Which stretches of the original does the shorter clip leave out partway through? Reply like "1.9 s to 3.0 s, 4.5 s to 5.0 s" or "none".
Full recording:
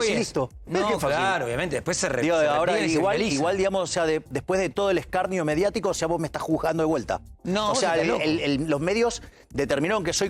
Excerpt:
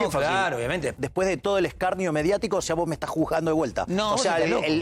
1.8 s to 4.3 s, 7.1 s to 7.4 s

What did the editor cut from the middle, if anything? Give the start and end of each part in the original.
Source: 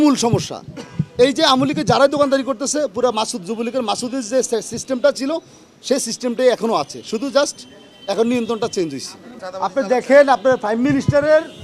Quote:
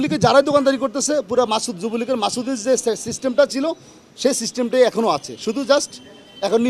none

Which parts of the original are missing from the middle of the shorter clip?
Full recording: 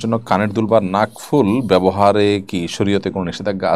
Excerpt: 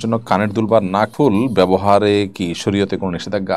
1.1 s to 1.2 s

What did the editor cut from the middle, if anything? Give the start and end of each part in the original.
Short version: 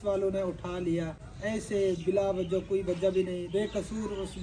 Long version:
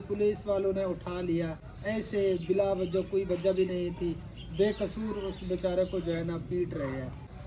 3.9 s to 4.5 s

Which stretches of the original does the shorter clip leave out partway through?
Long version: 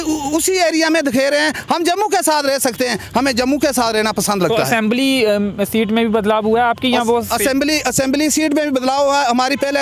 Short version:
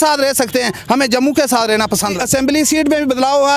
4.4 s to 7.8 s

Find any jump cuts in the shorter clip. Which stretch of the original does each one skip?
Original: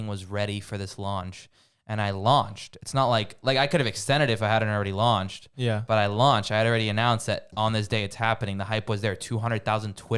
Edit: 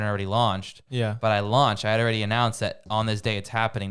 none

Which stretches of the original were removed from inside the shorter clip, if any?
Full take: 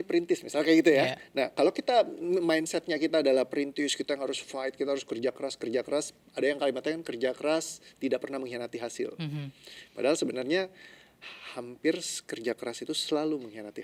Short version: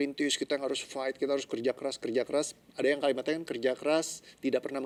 none

